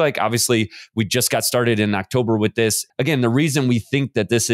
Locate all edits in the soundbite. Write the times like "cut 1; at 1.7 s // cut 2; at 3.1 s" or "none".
cut 1; at 2.8 s